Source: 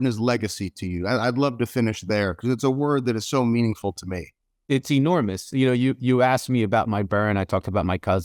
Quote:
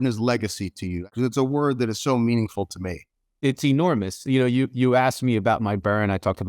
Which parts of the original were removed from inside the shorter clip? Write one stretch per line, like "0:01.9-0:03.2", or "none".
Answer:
0:01.1-0:02.3